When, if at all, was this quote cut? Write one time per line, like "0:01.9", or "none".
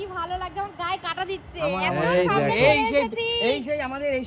none